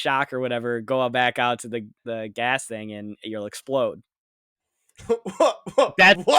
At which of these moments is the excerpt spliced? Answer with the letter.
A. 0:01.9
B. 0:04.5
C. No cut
A